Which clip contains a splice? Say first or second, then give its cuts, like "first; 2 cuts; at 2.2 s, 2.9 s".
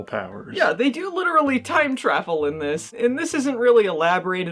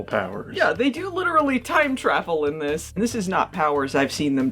second; 1 cut; at 3.0 s